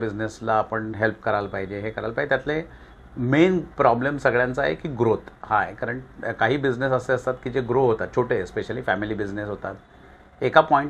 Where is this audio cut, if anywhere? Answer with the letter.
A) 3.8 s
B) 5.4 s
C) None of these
C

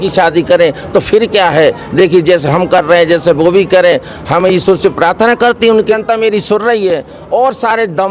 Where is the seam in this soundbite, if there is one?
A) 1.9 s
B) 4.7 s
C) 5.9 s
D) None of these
C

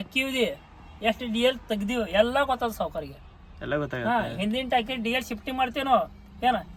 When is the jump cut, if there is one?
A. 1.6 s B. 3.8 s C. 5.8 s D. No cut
D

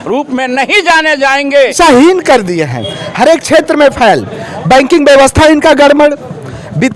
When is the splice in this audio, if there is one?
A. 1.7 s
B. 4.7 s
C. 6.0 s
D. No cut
A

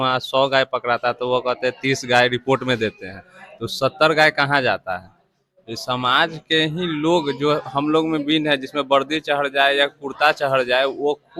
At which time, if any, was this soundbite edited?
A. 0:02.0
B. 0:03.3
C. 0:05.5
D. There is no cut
D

